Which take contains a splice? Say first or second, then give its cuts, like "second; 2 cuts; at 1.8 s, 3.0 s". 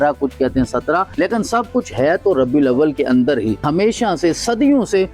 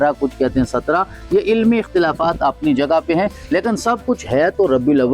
first; 2 cuts; at 1.1 s, 3.6 s